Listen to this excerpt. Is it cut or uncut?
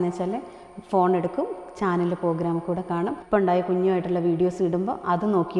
cut